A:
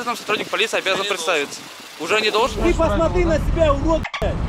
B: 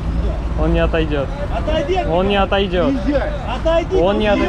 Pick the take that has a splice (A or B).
A